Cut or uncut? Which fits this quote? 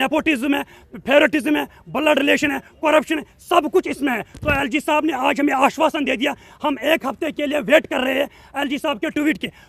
uncut